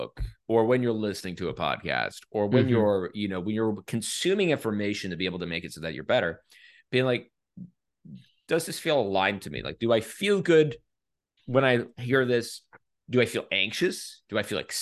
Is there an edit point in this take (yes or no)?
no